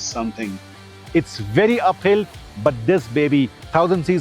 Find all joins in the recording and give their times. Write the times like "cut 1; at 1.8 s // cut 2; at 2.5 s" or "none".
cut 1; at 0.9 s